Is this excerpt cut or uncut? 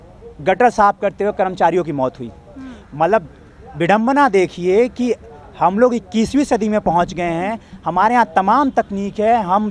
uncut